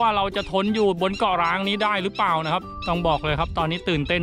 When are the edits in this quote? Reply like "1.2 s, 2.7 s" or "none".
2.7 s